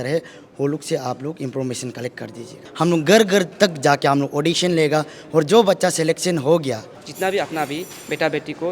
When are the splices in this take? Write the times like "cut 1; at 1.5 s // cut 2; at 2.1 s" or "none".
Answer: cut 1; at 2.6 s // cut 2; at 6.9 s